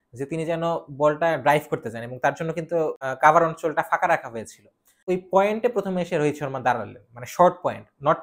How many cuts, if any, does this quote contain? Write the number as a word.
two